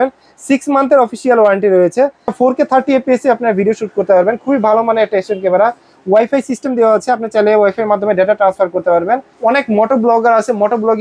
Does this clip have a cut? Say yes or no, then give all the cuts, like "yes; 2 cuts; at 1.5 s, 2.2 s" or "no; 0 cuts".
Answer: yes; 2 cuts; at 2.3 s, 9.3 s